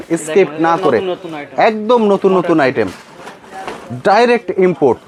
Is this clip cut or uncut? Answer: uncut